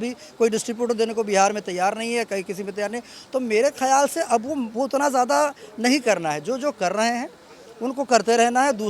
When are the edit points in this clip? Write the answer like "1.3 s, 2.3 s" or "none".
none